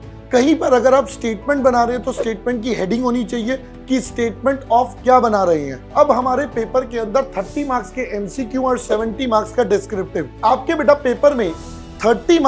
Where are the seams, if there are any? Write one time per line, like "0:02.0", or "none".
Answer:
0:05.9
0:10.3